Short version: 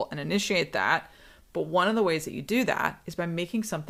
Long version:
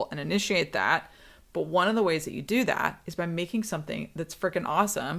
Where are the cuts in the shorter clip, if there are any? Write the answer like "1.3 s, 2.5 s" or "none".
none